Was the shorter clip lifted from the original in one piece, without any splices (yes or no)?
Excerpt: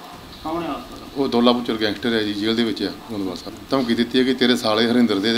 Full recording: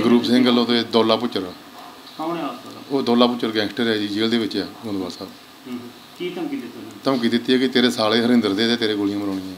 no